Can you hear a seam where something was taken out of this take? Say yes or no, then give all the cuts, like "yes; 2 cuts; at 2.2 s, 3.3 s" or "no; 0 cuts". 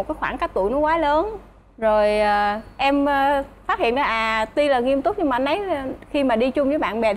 no; 0 cuts